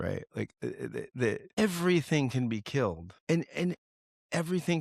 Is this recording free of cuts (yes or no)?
no